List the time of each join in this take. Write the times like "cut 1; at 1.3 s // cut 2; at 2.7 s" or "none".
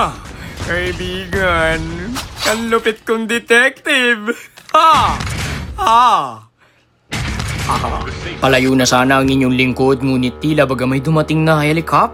none